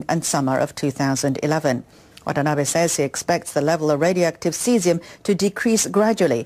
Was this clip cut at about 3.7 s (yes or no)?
yes